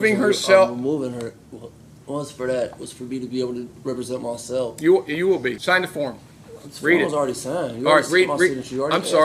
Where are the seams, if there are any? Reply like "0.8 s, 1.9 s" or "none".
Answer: 5.6 s